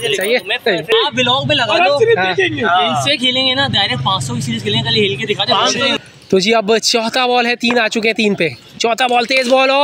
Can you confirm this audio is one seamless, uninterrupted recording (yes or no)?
no